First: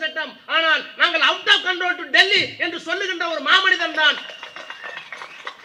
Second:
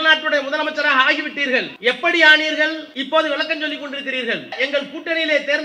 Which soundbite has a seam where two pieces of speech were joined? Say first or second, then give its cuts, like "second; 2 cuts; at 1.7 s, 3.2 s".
second; 3 cuts; at 1.7 s, 2.9 s, 4.5 s